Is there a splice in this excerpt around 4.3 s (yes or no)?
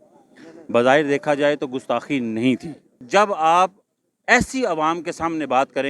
no